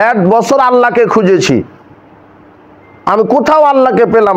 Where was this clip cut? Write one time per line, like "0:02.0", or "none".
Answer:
none